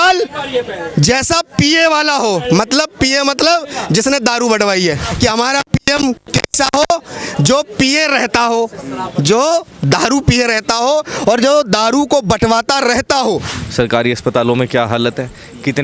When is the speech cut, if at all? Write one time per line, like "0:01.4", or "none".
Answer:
0:05.1
0:13.6